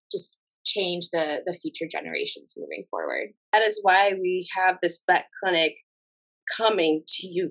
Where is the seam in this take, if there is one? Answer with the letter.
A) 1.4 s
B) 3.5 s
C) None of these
B